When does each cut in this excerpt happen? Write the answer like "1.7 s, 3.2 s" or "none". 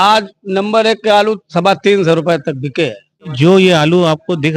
3.3 s